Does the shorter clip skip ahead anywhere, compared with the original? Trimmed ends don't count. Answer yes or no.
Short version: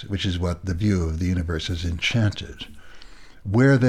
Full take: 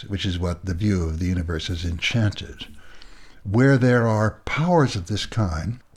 no